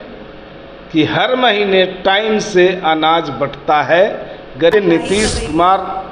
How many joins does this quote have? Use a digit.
1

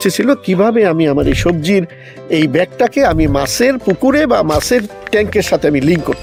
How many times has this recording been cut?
0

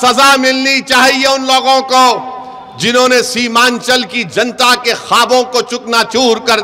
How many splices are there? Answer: 0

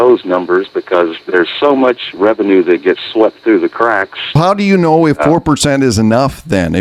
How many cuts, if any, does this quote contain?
0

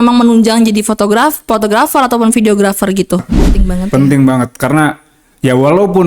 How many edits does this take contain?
1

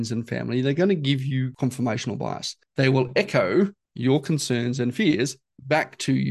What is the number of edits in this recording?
3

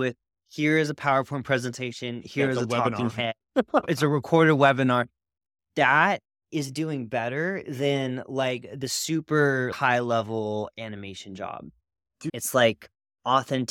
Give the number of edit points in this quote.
3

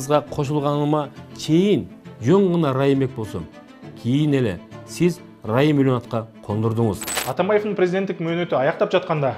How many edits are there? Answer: 1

